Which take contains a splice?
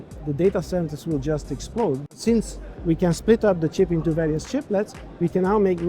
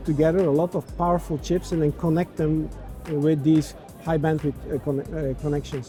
first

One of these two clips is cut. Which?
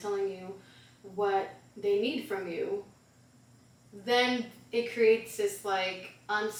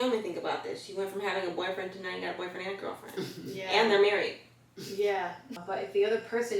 second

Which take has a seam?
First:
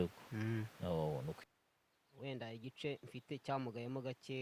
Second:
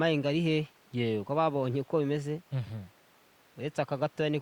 first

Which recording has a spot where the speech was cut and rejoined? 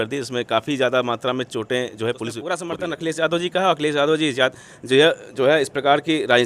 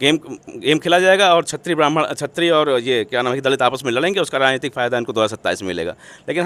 first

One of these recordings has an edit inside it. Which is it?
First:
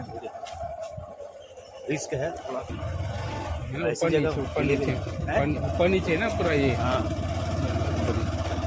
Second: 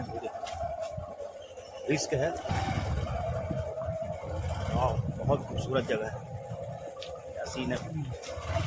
second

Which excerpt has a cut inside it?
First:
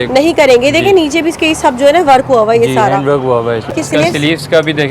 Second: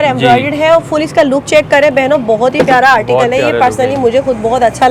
first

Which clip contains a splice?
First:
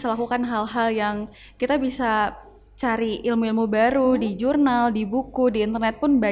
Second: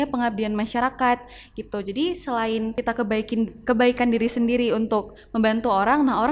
second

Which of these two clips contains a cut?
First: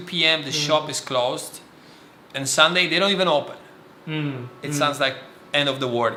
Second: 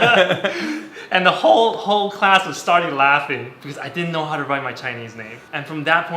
second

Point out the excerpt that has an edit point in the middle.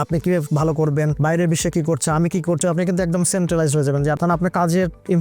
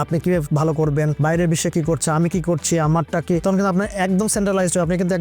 first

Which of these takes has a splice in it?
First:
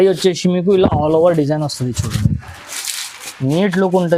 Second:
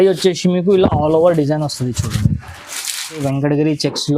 second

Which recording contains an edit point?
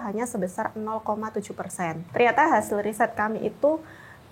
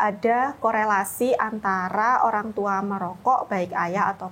first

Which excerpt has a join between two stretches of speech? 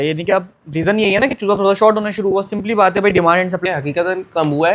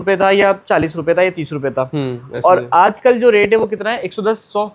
first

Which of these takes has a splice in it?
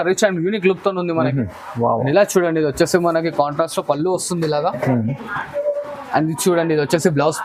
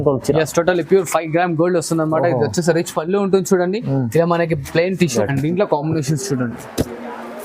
second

